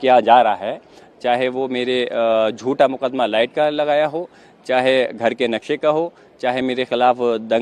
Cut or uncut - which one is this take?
uncut